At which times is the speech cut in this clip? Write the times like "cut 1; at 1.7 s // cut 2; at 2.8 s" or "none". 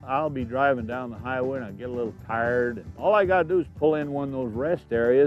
cut 1; at 2.9 s

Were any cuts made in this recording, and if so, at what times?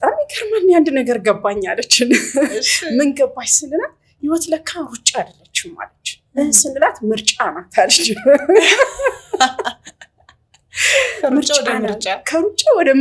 none

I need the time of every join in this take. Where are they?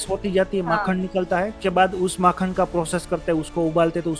cut 1; at 1.6 s

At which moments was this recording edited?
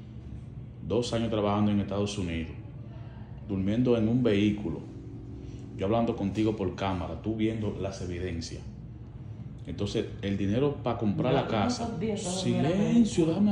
none

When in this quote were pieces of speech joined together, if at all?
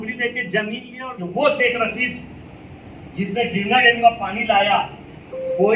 cut 1; at 0.9 s

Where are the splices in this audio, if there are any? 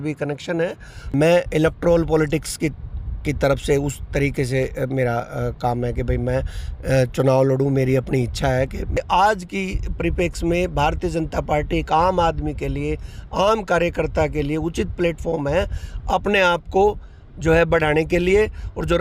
cut 1; at 1.1 s // cut 2; at 9.0 s

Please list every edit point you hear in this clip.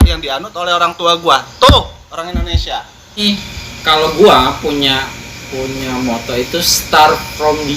cut 1; at 3.2 s

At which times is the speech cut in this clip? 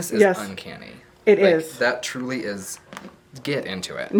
none

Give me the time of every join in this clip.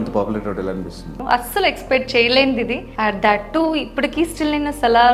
cut 1; at 1.1 s // cut 2; at 2.8 s

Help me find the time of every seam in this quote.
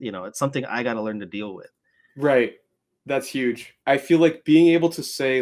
cut 1; at 3.7 s

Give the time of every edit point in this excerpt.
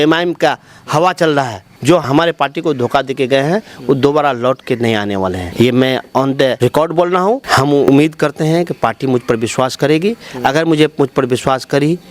cut 1; at 1.7 s // cut 2; at 5.4 s // cut 3; at 6.6 s // cut 4; at 7.4 s

